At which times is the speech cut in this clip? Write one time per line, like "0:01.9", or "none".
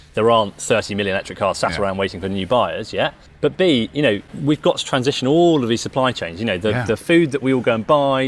0:03.2
0:04.3